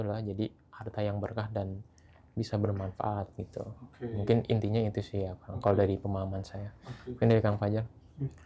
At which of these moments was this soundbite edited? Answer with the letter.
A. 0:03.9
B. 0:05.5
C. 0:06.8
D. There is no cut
D